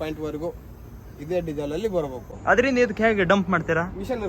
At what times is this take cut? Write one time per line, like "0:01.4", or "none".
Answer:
0:02.3